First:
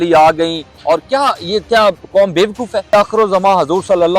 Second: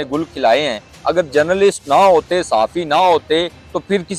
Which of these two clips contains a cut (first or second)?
first